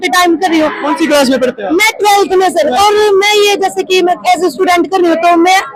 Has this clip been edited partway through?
no; 0 cuts

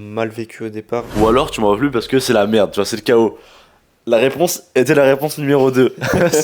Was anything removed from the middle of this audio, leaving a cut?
yes; 1 cut; at 1.1 s

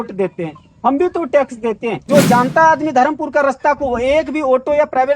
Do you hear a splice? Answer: yes; 1 cut; at 2.0 s

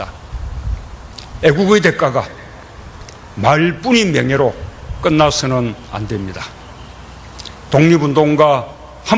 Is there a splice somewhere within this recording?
no; 0 cuts

